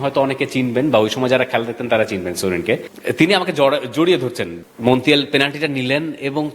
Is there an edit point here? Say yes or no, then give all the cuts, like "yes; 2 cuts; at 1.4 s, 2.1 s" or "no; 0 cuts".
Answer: yes; 2 cuts; at 2.9 s, 4.5 s